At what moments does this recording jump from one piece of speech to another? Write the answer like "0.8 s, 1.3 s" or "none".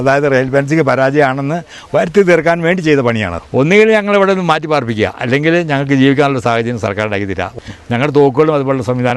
3.4 s, 7.5 s